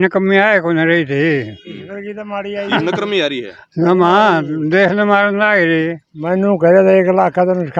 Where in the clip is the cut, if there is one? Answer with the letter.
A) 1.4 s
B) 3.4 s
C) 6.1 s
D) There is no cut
C